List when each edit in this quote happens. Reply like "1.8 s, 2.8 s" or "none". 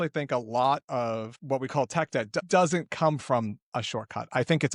1.3 s